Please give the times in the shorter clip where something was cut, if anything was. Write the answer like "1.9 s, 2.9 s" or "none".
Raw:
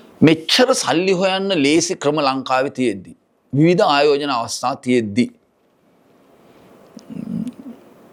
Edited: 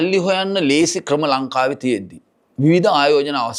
none